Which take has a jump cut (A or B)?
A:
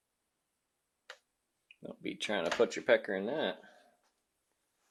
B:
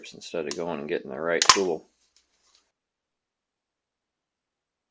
B